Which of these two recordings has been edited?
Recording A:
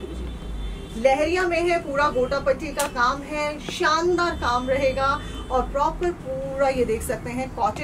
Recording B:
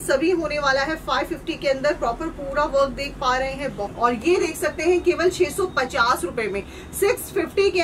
B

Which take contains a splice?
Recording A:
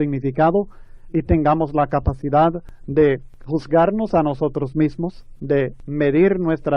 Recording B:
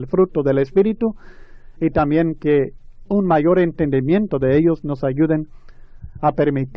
A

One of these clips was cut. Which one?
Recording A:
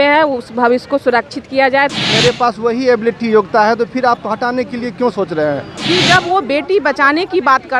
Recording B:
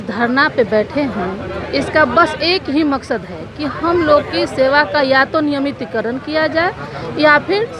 A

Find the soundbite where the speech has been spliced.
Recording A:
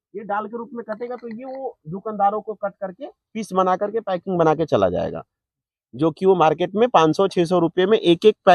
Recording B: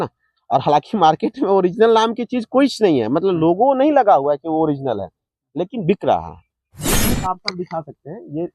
B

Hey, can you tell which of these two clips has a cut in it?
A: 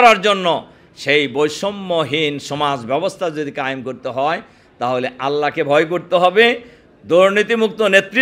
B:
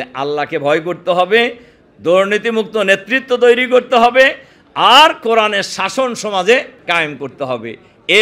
B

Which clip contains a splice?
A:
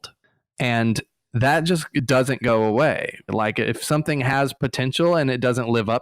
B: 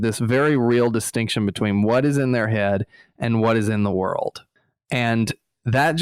A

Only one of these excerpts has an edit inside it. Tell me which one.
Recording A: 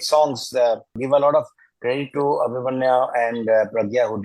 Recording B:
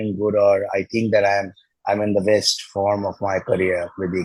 A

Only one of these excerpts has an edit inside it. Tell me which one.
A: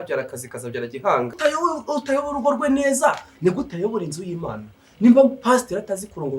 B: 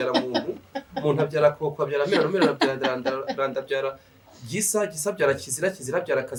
A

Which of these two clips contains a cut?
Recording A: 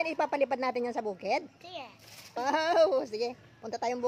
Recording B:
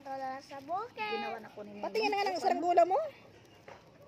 A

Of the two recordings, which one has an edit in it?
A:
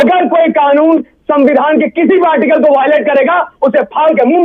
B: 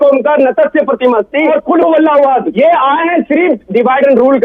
B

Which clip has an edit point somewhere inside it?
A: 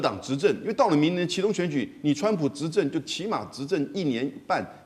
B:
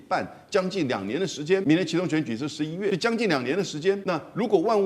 B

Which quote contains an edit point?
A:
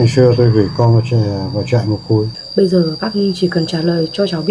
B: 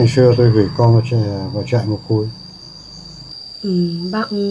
A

